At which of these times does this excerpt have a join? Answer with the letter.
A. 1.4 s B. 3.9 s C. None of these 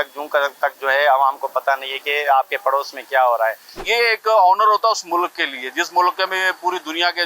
B